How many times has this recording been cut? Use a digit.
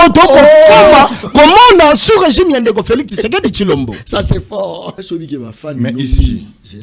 1